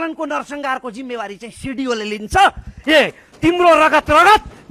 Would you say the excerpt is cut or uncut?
uncut